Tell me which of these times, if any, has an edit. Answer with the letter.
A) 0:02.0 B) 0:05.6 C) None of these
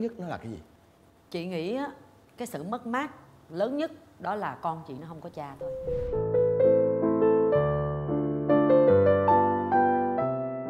C